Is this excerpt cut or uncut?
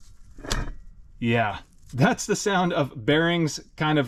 uncut